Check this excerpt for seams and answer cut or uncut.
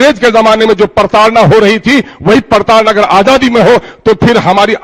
uncut